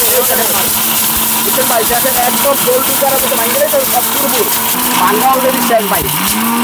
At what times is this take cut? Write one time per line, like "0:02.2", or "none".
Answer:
0:04.8